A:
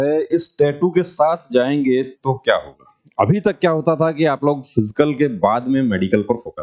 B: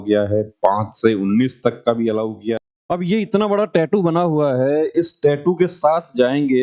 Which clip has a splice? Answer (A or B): B